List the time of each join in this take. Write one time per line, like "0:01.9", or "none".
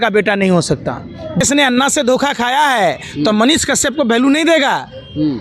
0:01.4